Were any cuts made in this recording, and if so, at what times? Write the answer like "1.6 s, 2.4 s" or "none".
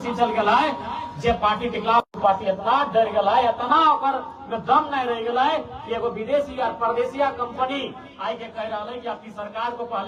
none